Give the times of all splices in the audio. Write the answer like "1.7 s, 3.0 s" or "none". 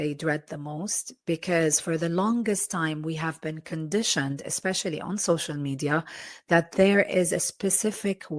none